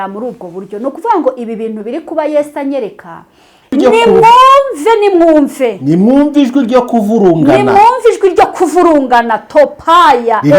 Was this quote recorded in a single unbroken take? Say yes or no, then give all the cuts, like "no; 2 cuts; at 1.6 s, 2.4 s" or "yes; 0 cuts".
no; 1 cut; at 3.7 s